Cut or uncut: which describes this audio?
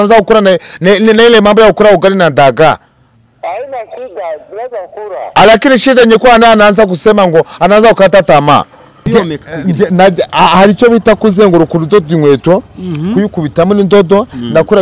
cut